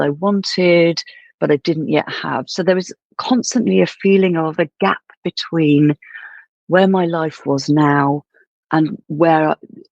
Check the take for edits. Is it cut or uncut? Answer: uncut